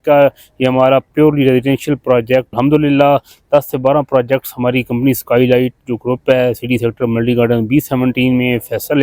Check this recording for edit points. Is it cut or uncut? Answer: cut